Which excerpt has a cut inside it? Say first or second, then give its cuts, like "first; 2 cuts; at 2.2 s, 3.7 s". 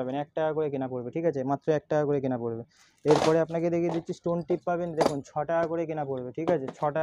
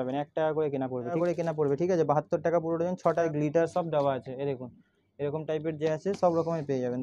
second; 2 cuts; at 1.2 s, 3.2 s